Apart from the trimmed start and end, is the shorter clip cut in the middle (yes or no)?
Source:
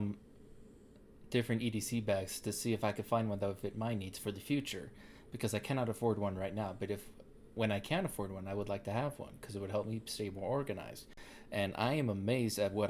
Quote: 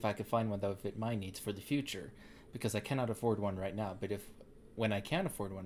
no